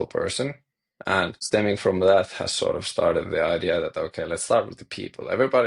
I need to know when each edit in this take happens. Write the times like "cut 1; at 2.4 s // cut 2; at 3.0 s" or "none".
cut 1; at 1.4 s

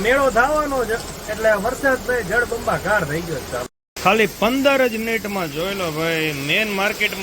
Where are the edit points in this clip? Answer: cut 1; at 3.8 s

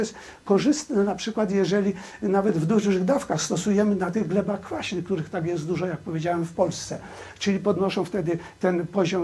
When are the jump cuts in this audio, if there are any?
none

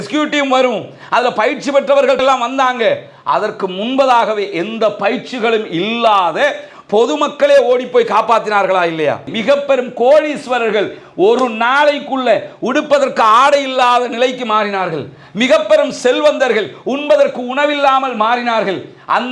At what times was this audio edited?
cut 1; at 9.3 s

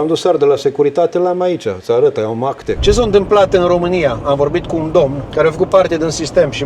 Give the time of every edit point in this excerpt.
cut 1; at 2.7 s // cut 2; at 5.2 s

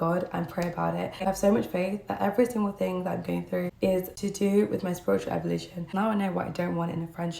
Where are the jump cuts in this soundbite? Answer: cut 1; at 1.2 s // cut 2; at 3.7 s // cut 3; at 5.9 s

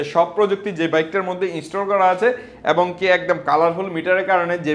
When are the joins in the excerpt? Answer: none

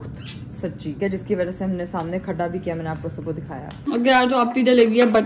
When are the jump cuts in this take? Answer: none

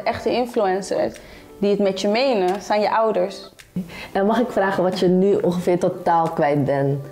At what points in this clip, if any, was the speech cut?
cut 1; at 3.9 s

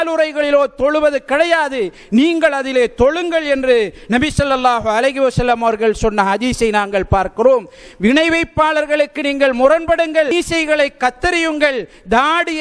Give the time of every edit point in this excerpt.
cut 1; at 10.3 s

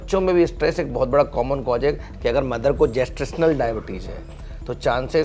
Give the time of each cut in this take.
cut 1; at 2.1 s

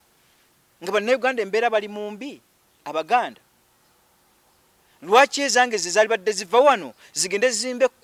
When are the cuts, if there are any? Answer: none

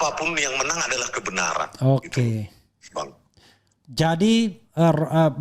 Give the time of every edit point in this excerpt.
none

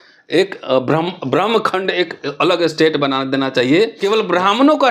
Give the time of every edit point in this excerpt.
cut 1; at 3.9 s

